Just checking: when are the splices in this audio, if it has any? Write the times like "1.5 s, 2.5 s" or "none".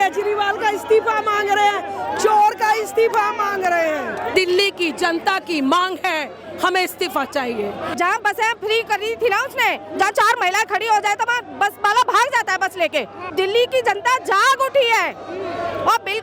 4.3 s, 7.9 s, 13.3 s